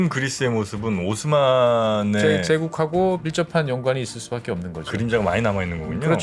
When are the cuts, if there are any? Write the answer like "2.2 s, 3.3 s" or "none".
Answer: none